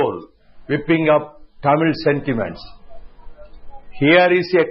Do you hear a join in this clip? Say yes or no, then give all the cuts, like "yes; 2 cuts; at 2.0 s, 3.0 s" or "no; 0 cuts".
yes; 1 cut; at 2.3 s